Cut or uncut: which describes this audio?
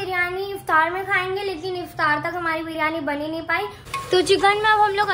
cut